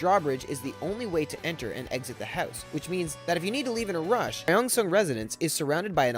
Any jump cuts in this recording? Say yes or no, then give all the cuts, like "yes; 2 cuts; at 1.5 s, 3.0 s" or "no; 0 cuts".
yes; 1 cut; at 4.5 s